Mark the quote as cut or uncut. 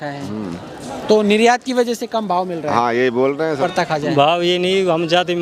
cut